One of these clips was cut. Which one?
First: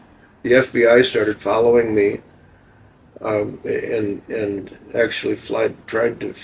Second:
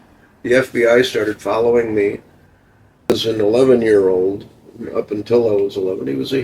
second; 1 cut; at 3.2 s

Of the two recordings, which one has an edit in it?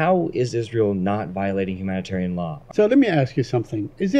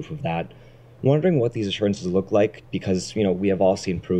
first; 1 cut; at 2.6 s

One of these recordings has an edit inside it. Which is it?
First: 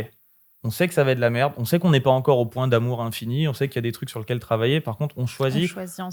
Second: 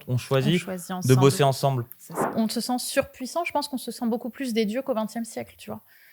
second; 1 cut; at 2.2 s

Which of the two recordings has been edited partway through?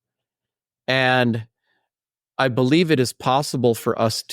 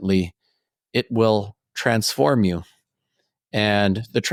first; 1 cut; at 2.2 s

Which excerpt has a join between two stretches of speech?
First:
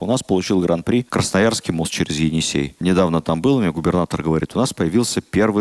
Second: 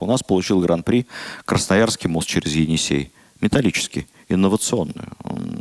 first; 2 cuts; at 1.1 s, 2.8 s

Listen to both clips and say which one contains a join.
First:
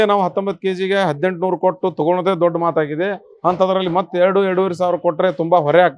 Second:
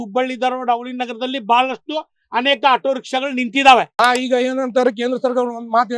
second; 1 cut; at 3.9 s

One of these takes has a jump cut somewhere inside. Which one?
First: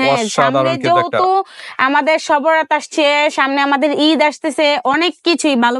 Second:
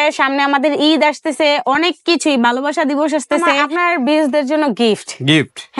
second; 1 cut; at 3.6 s

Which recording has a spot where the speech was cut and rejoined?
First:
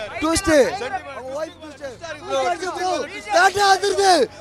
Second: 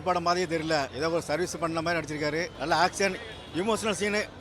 second; 2 cuts; at 0.9 s, 2.5 s

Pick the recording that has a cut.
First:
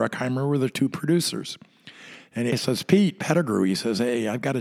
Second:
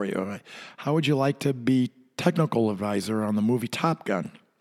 first; 1 cut; at 2.5 s

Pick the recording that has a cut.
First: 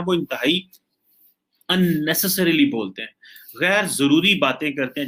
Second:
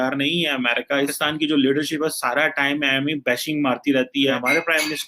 second; 2 cuts; at 1.1 s, 4.3 s

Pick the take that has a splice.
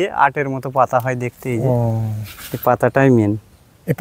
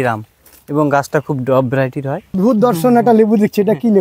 second; 1 cut; at 2.4 s

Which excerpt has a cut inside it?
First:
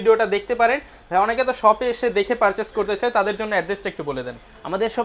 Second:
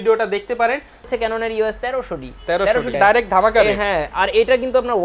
second; 2 cuts; at 1.1 s, 2.9 s

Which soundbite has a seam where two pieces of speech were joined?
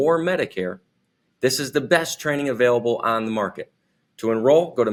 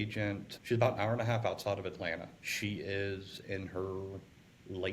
second; 1 cut; at 2.4 s

